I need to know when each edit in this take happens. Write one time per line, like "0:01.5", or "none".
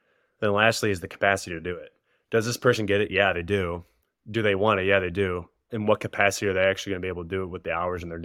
0:05.7